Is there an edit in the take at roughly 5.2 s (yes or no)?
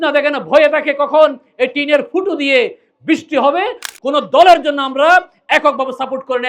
no